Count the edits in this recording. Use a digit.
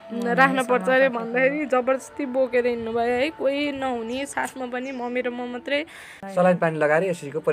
1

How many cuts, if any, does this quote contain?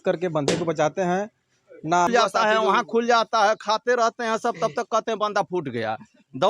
1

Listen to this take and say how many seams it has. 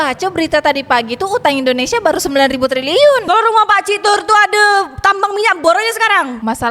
1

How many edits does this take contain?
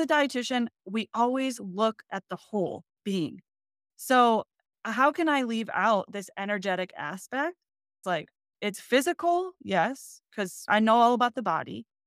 2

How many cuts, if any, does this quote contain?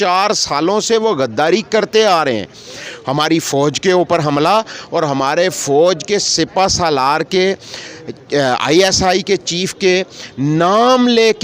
0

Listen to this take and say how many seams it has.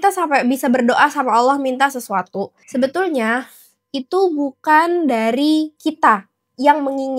2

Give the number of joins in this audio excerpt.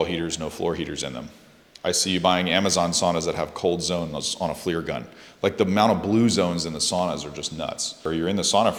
0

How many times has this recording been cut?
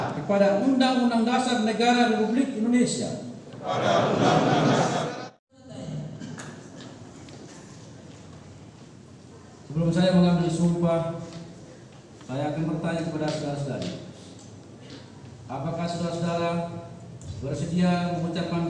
1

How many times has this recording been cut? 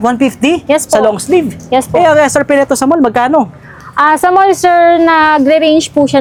0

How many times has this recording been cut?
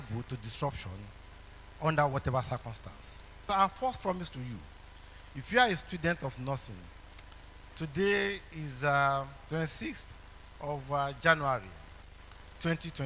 1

